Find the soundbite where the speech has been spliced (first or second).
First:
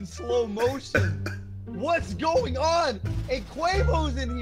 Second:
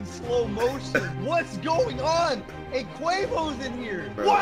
second